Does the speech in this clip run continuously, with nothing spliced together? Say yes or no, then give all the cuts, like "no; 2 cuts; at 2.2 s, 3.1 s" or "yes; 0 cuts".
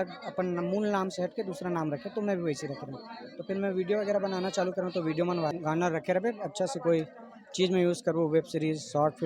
no; 1 cut; at 5.5 s